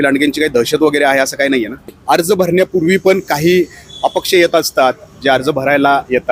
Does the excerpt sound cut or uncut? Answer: cut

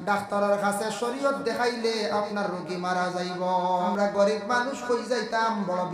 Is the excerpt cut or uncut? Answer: cut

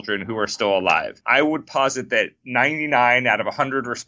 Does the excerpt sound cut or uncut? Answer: cut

